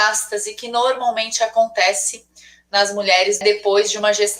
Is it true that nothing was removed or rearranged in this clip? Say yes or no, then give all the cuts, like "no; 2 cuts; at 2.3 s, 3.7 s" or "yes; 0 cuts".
no; 1 cut; at 3.4 s